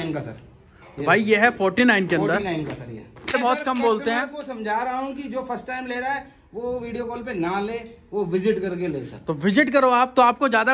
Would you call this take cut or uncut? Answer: cut